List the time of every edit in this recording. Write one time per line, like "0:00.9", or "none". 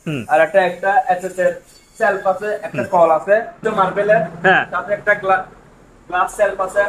0:03.6